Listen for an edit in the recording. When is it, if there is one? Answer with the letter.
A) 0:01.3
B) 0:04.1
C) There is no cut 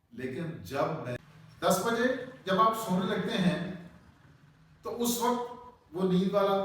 A